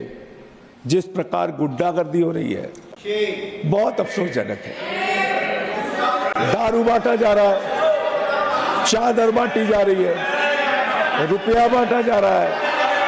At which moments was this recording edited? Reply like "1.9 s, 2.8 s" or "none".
none